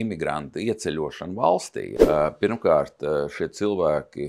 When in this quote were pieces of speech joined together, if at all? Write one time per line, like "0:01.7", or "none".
0:01.9